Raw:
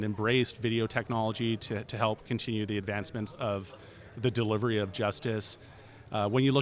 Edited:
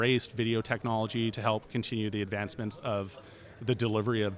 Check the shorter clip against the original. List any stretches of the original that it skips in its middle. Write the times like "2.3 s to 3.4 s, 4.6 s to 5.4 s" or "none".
1.6 s to 1.9 s